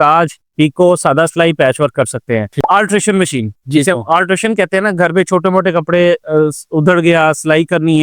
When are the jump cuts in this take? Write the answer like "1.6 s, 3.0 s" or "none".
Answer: 2.5 s